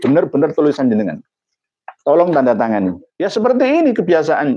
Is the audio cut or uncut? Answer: cut